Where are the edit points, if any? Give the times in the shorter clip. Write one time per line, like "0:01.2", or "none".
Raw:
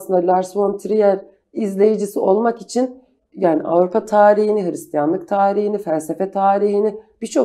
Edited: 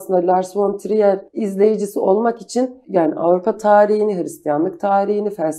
0:01.3
0:02.8